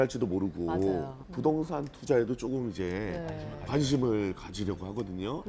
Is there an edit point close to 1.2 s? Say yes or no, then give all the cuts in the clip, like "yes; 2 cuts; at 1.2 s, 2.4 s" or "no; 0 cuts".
yes; 1 cut; at 1.2 s